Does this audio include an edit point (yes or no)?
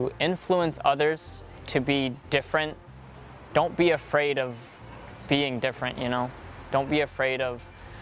no